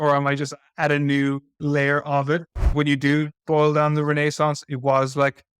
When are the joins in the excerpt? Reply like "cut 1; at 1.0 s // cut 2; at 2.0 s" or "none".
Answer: cut 1; at 1.5 s // cut 2; at 2.7 s